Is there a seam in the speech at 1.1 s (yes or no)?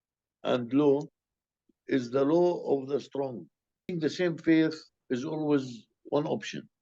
no